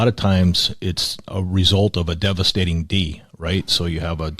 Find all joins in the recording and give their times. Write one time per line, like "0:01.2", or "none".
0:01.3